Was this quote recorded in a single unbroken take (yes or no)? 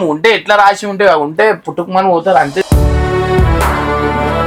yes